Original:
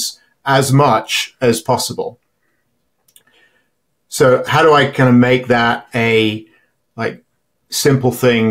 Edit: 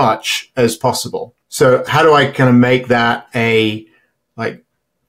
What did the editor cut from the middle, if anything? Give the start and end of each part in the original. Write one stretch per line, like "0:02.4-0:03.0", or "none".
0:02.2-0:04.0

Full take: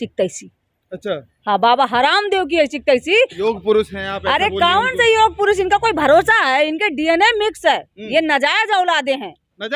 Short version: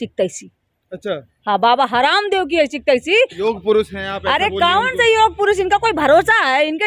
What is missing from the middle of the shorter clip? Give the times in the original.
none

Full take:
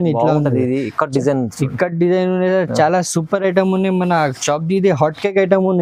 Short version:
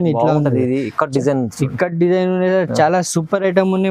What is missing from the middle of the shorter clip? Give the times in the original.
none

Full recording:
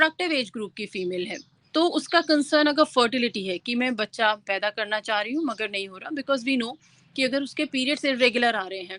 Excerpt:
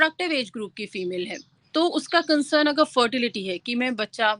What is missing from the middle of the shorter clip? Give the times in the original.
none

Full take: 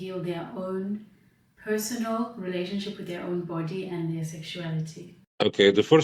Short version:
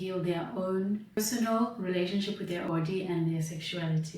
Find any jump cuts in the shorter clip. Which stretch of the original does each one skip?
0:01.2-0:01.8
0:03.2-0:03.5

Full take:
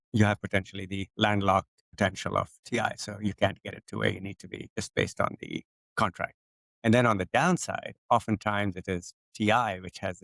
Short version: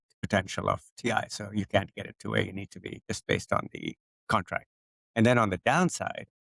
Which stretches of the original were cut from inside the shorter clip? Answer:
none

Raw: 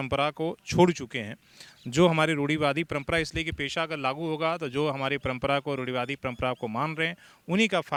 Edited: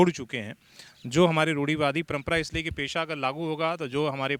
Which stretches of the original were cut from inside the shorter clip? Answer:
none

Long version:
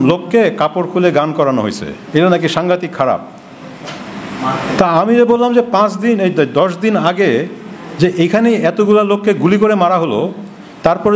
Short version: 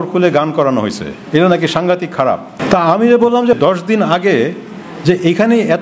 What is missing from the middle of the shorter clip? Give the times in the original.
0:03.4-0:04.6
0:05.7-0:06.5

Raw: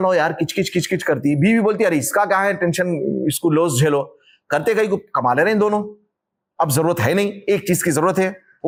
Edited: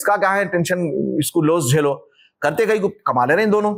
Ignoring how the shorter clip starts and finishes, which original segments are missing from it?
none

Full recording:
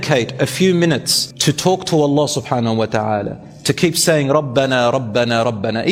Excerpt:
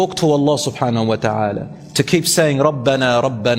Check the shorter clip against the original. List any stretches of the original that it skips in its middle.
none

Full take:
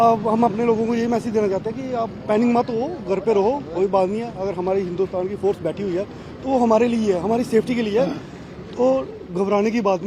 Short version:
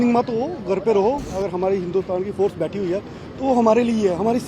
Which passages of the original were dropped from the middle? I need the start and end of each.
0:03.7-0:04.3

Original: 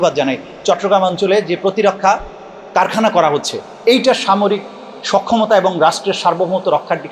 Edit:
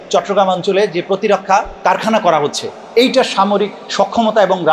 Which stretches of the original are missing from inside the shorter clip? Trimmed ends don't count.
0:02.3-0:02.6
0:04.7-0:04.9

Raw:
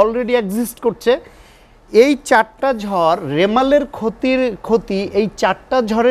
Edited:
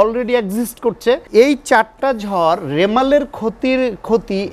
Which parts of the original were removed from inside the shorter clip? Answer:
0:01.2-0:01.9

